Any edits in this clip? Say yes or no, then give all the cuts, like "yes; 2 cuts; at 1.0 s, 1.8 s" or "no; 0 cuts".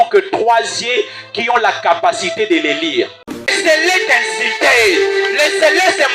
yes; 1 cut; at 3.4 s